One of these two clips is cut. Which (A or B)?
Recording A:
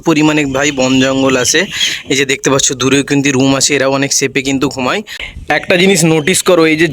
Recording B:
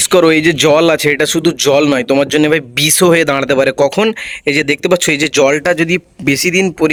A